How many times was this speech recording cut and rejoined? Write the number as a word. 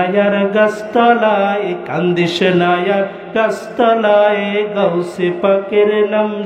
zero